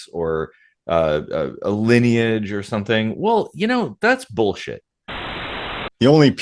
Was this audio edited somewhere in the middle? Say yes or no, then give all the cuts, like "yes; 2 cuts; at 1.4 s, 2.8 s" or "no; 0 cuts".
yes; 1 cut; at 5.3 s